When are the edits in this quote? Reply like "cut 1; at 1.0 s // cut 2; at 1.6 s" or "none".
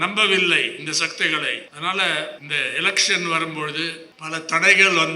cut 1; at 1.7 s // cut 2; at 2.4 s // cut 3; at 4.1 s